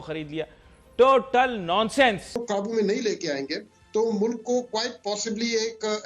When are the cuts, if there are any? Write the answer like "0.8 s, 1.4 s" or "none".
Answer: 2.3 s